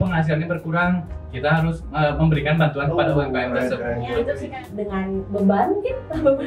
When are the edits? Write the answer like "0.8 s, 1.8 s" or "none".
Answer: 4.4 s